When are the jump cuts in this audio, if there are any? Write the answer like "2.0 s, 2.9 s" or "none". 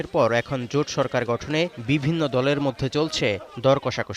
none